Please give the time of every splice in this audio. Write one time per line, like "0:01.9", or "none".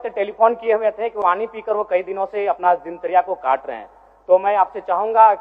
0:01.2